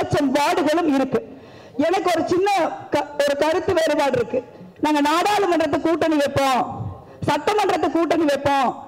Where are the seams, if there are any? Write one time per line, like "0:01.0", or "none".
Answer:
none